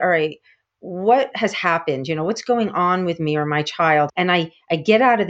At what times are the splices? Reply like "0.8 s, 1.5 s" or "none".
4.1 s